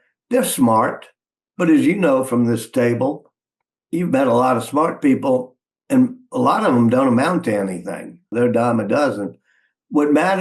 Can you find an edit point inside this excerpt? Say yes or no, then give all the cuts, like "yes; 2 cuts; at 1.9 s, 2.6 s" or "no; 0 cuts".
yes; 1 cut; at 8.3 s